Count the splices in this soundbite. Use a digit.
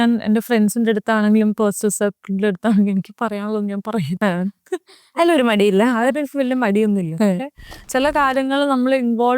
1